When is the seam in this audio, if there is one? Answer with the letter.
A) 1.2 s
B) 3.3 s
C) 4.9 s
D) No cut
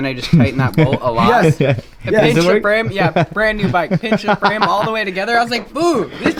D